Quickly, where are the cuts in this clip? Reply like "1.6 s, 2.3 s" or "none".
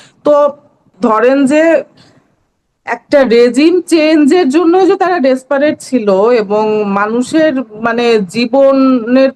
0.9 s